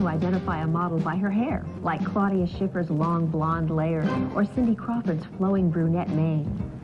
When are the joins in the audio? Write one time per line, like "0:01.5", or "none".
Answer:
0:02.2